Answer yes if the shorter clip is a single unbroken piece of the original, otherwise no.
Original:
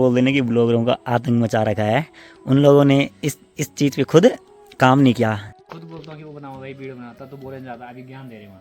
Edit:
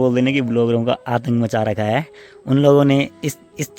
yes